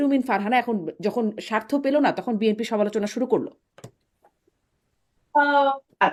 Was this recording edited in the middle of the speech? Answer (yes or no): no